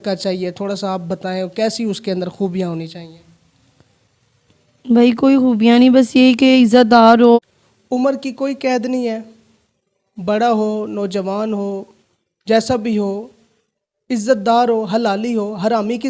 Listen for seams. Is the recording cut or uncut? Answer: cut